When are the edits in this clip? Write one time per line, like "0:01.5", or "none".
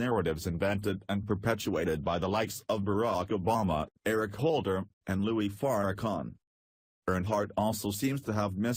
0:02.1